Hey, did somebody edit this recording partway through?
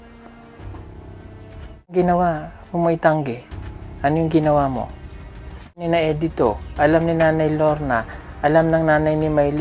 yes; 2 cuts; at 1.9 s, 5.8 s

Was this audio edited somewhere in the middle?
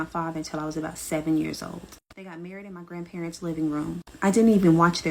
no; 0 cuts

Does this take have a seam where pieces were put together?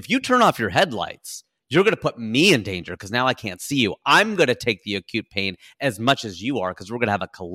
no; 0 cuts

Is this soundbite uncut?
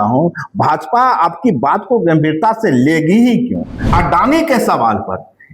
no; 1 cut; at 3.8 s

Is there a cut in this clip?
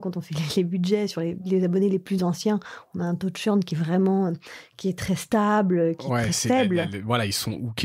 no; 0 cuts

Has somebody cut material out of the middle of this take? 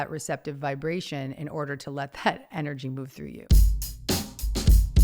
yes; 1 cut; at 3.4 s

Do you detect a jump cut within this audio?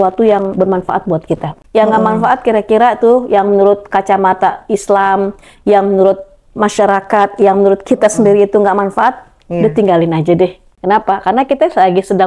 yes; 2 cuts; at 1.5 s, 10.7 s

